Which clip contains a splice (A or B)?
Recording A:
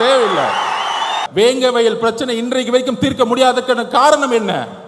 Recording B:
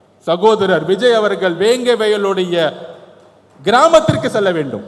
A